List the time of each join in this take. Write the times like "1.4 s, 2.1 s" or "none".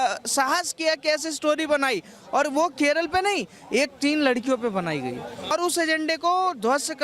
5.5 s